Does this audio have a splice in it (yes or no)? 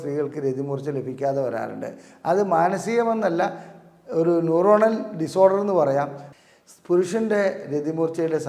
yes